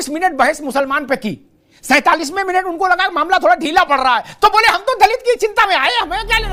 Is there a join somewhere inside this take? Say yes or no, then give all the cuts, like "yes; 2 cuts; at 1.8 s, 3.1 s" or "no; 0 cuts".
no; 0 cuts